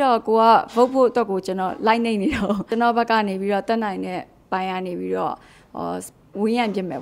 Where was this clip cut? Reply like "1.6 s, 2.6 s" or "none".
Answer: 2.7 s